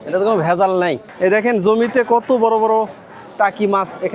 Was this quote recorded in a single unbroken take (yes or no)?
no